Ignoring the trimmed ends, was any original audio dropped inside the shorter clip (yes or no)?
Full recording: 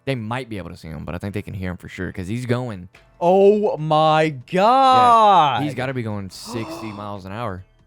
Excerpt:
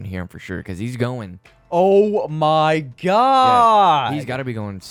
no